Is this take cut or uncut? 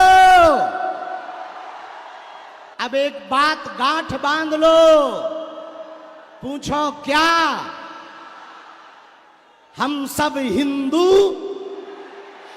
cut